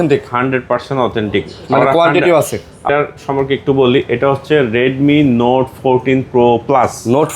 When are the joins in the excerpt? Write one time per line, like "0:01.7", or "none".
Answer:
0:02.8